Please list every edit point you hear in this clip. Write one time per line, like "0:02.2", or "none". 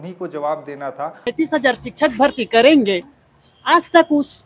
0:01.3